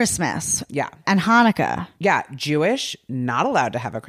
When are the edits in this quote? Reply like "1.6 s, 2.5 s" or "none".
1.0 s